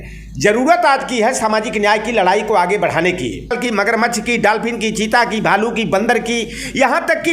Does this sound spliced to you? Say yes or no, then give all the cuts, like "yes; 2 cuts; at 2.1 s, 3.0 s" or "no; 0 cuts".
yes; 1 cut; at 3.5 s